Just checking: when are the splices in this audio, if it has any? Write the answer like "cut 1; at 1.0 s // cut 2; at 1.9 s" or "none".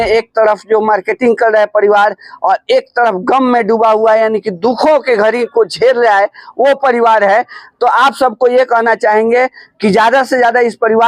none